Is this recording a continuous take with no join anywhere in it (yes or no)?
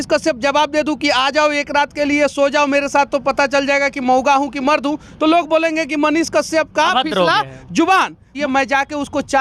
no